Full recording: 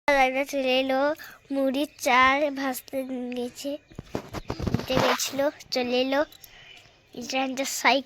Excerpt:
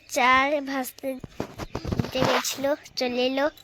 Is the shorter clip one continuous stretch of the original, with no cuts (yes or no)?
no